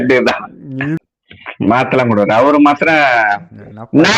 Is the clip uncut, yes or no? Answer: no